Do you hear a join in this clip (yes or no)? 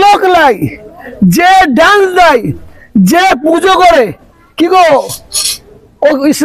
no